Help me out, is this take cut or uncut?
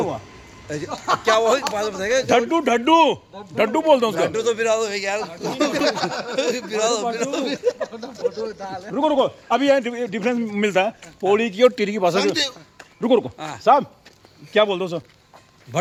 uncut